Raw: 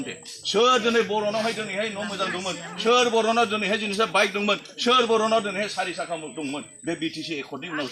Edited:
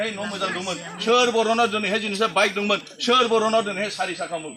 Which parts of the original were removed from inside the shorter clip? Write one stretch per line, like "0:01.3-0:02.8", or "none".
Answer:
none